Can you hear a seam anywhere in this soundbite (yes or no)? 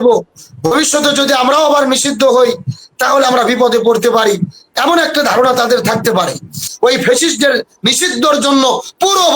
yes